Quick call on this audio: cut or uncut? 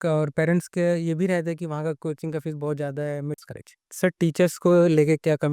cut